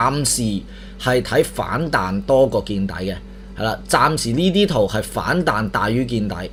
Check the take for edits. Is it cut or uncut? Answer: uncut